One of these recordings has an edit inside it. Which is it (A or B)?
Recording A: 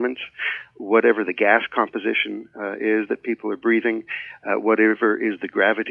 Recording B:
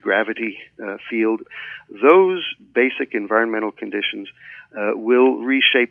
B